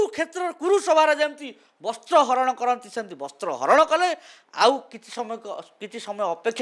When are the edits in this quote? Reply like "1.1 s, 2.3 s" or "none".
none